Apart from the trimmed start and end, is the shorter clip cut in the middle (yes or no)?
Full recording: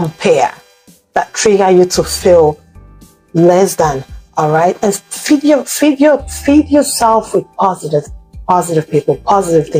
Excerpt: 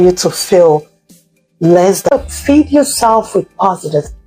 yes